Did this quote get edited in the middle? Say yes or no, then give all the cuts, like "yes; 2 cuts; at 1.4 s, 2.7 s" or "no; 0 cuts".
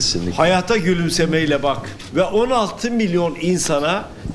yes; 1 cut; at 2.0 s